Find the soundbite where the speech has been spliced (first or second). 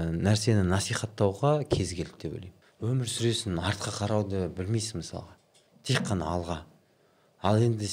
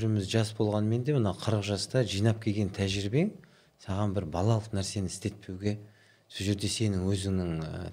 first